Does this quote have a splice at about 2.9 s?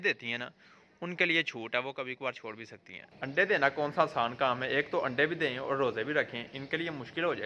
no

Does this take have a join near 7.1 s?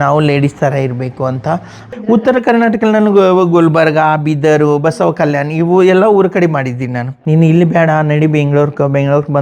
yes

